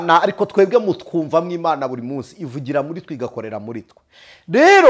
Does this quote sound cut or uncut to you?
uncut